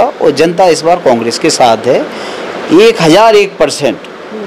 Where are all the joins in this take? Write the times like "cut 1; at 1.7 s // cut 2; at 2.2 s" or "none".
none